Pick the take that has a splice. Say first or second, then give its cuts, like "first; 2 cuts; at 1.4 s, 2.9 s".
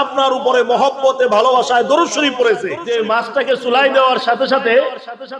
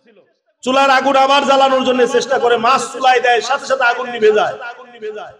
first; 1 cut; at 2.8 s